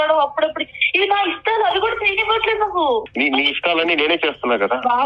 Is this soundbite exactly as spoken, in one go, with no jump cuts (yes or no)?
no